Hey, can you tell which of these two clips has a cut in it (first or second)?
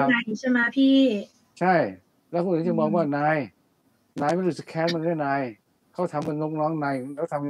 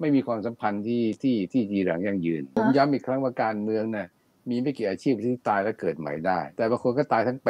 second